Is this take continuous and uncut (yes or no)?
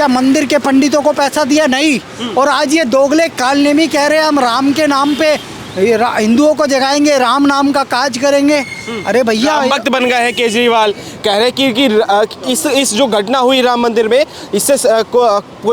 yes